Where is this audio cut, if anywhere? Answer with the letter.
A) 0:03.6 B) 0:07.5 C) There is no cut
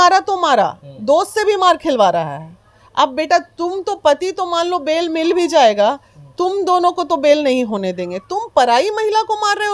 C